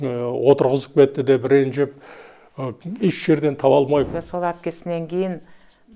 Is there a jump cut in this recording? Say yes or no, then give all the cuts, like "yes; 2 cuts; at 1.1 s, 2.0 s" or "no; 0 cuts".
yes; 1 cut; at 4.2 s